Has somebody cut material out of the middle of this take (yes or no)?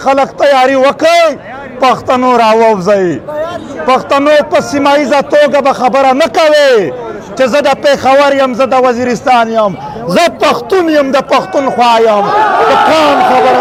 no